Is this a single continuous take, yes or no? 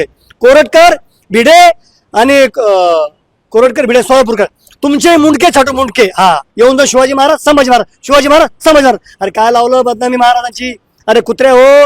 no